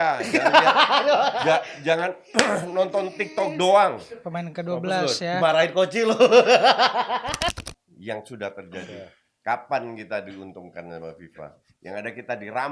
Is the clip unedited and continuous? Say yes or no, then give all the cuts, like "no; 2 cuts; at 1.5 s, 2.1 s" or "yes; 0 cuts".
no; 1 cut; at 7.5 s